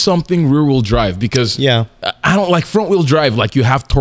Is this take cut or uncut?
uncut